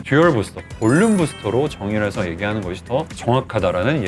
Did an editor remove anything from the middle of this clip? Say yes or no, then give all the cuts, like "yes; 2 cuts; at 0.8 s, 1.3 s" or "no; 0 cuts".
yes; 1 cut; at 3.1 s